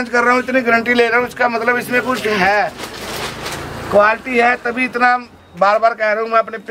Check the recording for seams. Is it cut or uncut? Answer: uncut